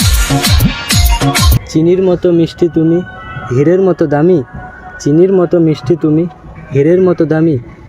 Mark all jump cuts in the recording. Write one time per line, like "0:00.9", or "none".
0:01.6

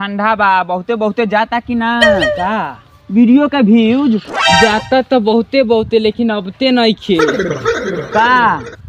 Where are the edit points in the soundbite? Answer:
none

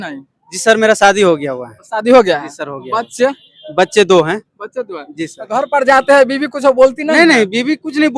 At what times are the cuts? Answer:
none

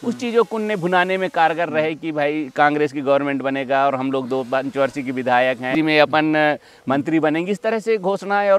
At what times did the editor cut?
0:05.7

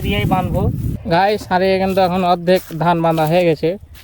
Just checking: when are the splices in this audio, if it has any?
0:01.0

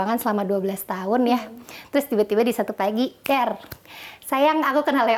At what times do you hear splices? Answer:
none

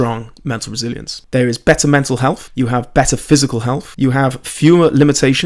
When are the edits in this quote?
0:01.1
0:02.4
0:03.9

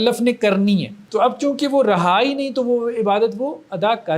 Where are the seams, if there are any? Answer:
0:01.0

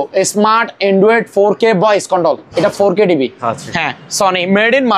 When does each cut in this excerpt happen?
0:03.5

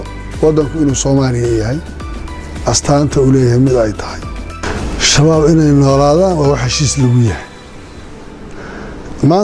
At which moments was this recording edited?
0:04.7

